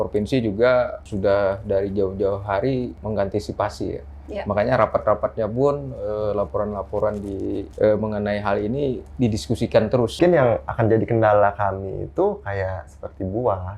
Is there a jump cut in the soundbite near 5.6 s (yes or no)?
no